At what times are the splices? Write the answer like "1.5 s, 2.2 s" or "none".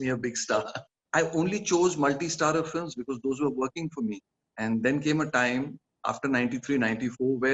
1.0 s